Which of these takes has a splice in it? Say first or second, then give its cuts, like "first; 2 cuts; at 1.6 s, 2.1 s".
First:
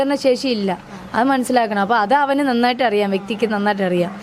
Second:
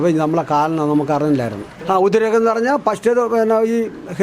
second; 1 cut; at 1.7 s